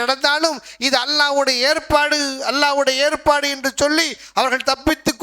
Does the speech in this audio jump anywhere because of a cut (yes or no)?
no